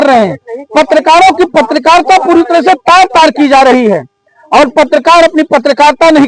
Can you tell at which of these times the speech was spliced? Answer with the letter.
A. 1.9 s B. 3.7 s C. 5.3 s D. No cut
D